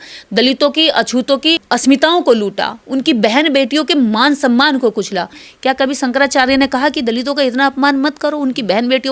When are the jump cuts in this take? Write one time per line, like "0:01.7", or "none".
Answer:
0:05.4